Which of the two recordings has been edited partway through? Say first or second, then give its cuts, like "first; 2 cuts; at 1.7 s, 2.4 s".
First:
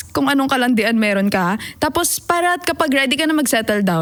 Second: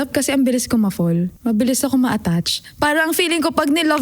second; 1 cut; at 1.3 s